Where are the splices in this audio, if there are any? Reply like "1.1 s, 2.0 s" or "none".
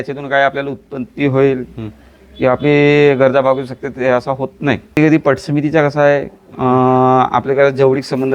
5.0 s